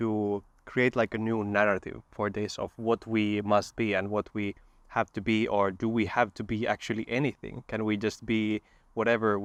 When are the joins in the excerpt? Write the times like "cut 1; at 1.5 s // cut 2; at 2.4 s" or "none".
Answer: none